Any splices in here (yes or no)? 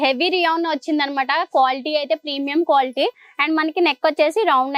no